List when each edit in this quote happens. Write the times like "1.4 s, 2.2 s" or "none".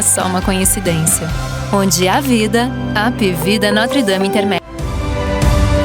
4.7 s